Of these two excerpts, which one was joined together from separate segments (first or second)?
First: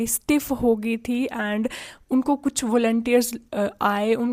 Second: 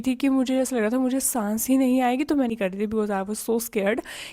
second